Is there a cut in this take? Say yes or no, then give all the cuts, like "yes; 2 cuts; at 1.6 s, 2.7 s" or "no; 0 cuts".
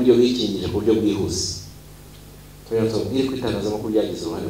no; 0 cuts